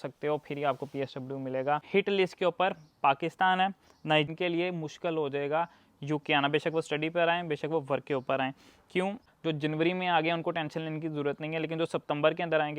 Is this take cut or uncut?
cut